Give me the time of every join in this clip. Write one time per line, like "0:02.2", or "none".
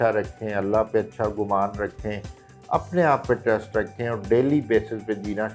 none